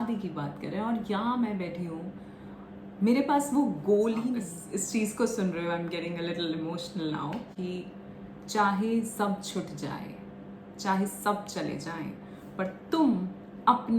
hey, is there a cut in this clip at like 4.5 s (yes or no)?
yes